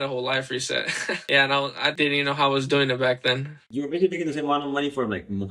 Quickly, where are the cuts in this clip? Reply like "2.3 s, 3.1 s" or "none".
1.2 s, 1.9 s, 3.7 s